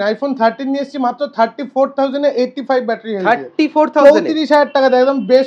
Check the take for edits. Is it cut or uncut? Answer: uncut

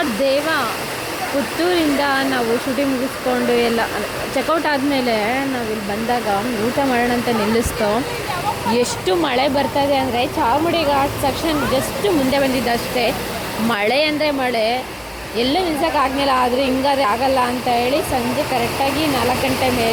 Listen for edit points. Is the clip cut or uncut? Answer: uncut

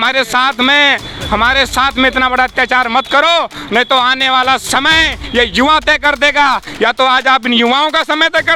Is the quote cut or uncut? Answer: uncut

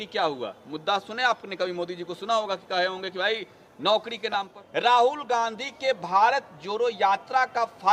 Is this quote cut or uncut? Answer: cut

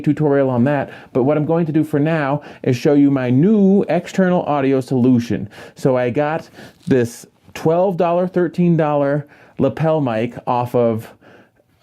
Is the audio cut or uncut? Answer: cut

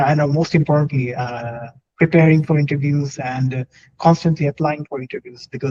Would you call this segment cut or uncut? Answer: uncut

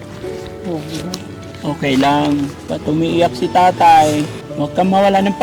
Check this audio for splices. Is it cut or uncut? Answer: cut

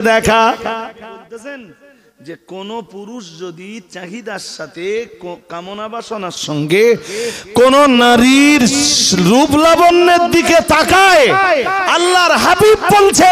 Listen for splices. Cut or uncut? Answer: cut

